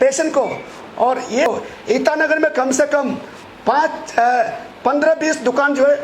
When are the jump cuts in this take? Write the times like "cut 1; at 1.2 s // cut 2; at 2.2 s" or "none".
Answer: cut 1; at 1.5 s